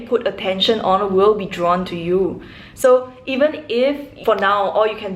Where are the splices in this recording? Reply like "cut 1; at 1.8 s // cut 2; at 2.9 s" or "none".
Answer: cut 1; at 4.1 s